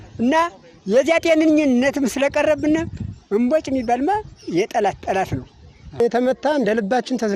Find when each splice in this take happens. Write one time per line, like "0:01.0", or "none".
0:01.8
0:06.0